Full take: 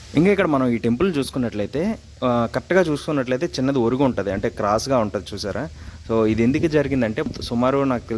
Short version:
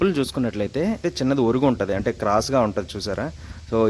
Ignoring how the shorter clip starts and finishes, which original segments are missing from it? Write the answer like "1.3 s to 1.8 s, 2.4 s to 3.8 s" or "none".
2.1 s to 3.5 s